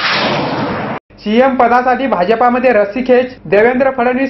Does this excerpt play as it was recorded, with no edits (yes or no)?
no